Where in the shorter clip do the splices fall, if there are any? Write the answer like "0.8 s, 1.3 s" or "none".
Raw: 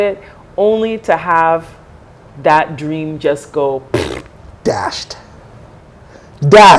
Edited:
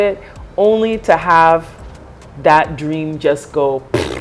none